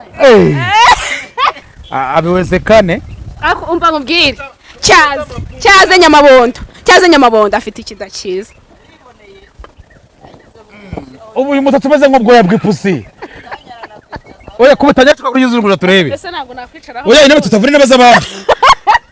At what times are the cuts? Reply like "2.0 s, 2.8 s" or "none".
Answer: 1.6 s